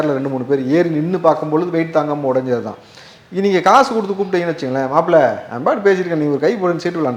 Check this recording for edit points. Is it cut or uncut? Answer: uncut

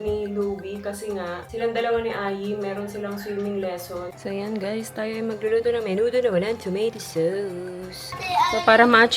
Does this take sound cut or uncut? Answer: cut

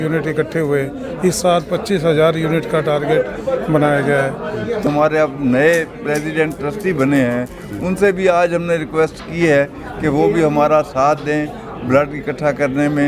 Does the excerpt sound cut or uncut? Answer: cut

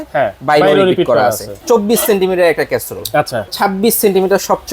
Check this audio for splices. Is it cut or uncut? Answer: cut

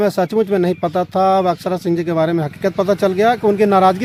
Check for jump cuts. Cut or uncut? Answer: uncut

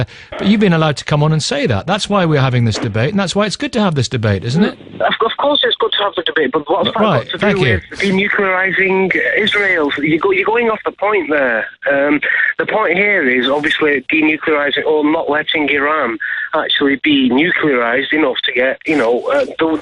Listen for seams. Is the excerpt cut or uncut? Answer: uncut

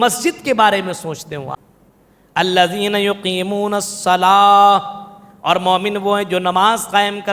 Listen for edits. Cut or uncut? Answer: cut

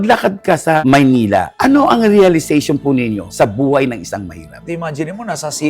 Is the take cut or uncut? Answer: cut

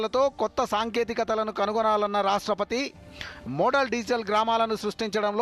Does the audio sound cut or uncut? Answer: uncut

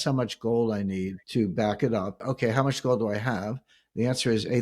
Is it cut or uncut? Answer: cut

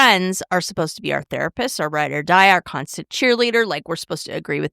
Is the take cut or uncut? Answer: uncut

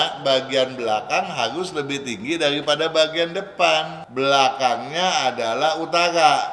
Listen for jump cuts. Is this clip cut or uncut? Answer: cut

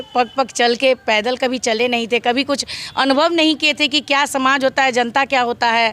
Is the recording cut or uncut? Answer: uncut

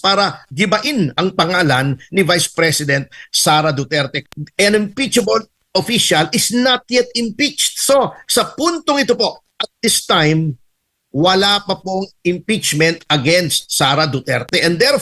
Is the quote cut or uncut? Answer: cut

